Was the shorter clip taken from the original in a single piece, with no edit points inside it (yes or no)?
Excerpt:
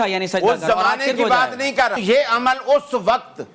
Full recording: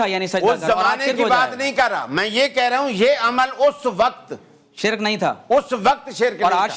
no